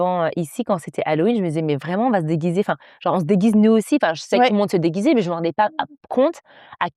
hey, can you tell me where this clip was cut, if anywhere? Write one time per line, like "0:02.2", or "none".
none